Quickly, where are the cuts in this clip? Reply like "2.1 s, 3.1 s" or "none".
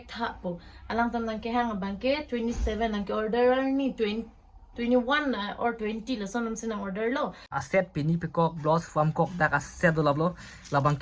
7.6 s